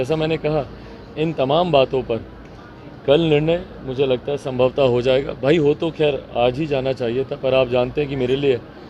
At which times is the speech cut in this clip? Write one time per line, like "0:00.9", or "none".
none